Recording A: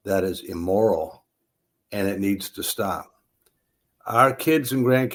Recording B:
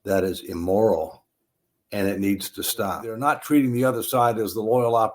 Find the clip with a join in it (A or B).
B